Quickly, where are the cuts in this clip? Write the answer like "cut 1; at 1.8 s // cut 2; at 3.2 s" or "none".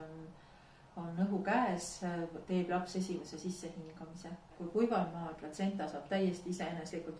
cut 1; at 4.6 s